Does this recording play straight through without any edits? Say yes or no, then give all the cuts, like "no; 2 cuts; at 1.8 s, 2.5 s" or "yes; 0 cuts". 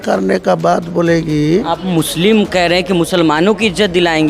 no; 1 cut; at 1.7 s